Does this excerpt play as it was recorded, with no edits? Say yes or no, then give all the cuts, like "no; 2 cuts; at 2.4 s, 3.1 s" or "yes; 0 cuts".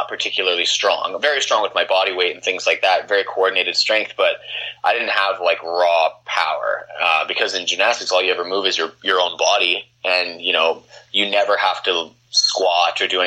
yes; 0 cuts